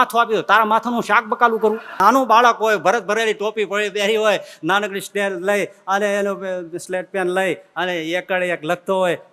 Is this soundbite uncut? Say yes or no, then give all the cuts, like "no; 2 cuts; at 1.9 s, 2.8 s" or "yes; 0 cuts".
no; 1 cut; at 1.9 s